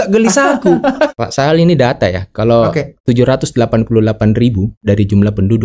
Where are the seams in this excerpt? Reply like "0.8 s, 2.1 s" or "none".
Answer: 1.2 s, 2.9 s, 4.8 s